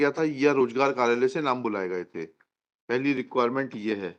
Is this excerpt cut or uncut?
uncut